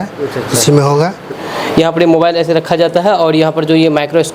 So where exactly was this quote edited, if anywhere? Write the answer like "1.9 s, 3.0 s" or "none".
1.3 s